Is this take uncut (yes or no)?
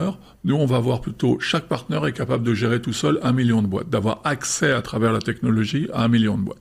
yes